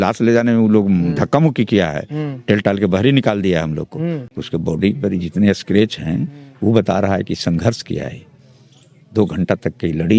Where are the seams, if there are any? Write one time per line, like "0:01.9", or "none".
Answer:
0:04.3